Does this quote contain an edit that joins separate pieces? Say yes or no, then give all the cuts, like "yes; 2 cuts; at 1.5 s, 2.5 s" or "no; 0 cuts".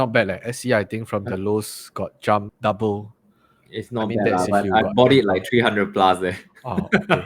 no; 0 cuts